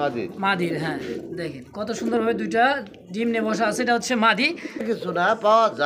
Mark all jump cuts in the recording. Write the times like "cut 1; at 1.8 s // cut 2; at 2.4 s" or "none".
cut 1; at 4.8 s